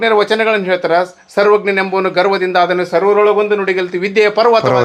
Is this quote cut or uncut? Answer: uncut